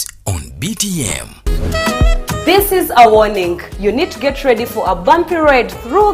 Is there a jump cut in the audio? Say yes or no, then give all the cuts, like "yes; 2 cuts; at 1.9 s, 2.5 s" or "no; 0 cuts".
yes; 1 cut; at 1.0 s